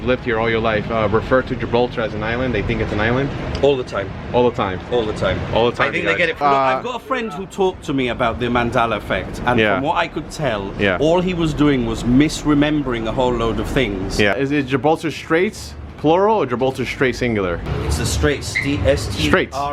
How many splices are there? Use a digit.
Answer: 3